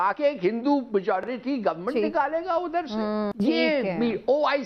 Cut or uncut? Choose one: cut